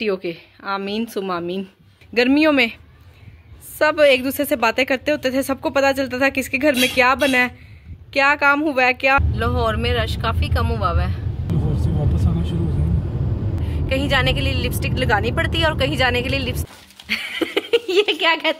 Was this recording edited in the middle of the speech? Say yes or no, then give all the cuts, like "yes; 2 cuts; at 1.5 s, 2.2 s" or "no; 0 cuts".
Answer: yes; 4 cuts; at 2.1 s, 9.2 s, 13.6 s, 16.7 s